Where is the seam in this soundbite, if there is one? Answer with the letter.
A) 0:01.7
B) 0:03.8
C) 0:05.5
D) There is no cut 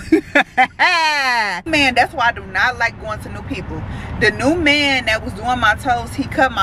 A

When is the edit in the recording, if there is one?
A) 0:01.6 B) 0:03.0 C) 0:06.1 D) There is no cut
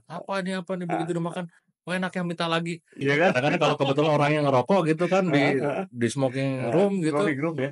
B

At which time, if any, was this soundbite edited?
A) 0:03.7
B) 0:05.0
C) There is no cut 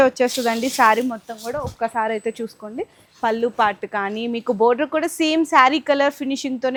C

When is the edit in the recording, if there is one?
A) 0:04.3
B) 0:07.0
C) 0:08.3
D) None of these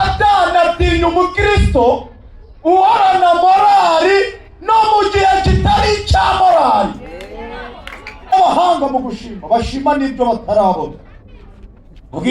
C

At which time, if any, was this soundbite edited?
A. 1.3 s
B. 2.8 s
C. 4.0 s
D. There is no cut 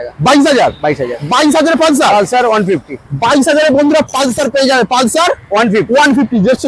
D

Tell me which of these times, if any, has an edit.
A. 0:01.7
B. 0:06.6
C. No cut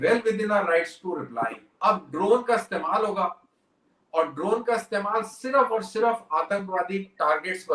A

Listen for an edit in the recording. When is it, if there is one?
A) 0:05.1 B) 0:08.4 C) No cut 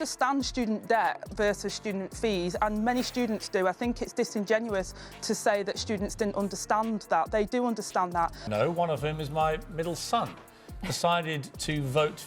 B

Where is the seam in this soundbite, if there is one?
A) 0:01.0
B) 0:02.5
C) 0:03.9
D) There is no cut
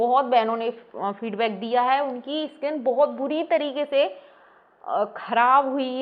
D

